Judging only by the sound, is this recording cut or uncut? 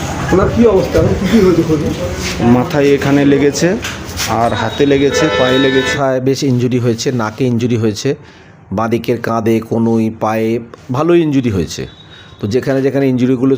cut